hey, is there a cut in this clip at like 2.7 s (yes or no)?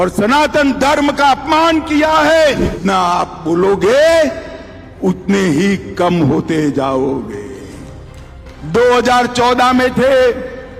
yes